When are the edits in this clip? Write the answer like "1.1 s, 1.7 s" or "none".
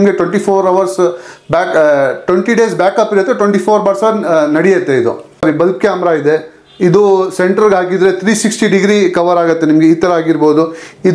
5.4 s